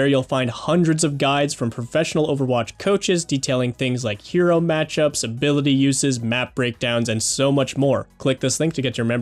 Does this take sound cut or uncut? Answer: cut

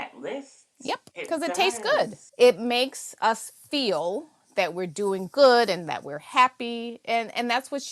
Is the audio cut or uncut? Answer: uncut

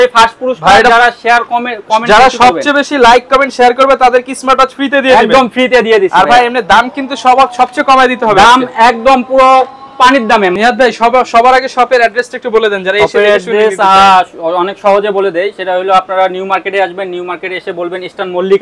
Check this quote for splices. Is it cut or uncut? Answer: uncut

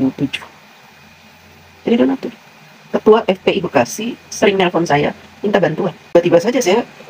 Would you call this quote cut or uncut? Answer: cut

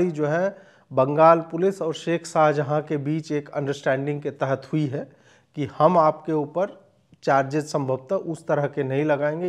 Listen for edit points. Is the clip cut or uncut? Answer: uncut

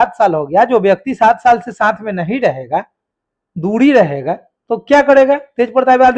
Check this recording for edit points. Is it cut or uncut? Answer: uncut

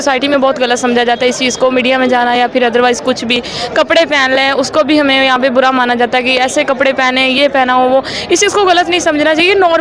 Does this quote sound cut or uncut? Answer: uncut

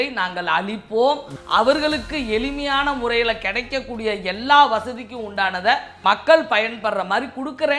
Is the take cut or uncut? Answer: cut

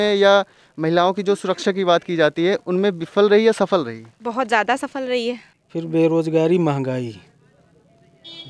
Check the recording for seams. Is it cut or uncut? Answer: cut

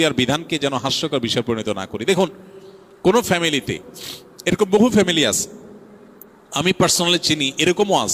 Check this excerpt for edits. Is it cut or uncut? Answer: uncut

